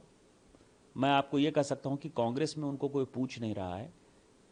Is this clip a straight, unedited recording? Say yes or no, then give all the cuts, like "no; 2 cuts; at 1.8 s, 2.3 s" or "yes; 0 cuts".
yes; 0 cuts